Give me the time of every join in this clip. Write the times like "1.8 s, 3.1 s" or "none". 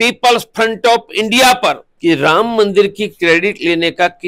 1.9 s